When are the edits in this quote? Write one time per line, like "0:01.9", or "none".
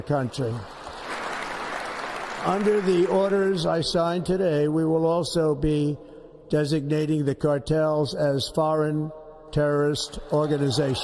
0:01.1